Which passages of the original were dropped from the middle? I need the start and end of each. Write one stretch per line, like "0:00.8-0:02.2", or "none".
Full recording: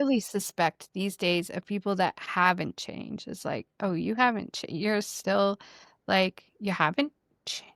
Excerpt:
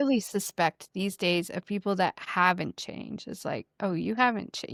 none